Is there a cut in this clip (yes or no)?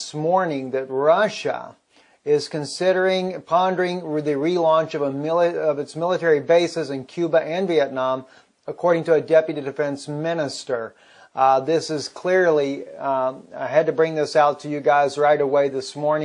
yes